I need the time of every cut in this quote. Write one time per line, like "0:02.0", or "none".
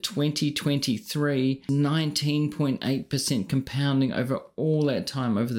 0:01.6